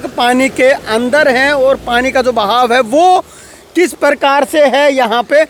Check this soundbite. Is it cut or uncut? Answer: uncut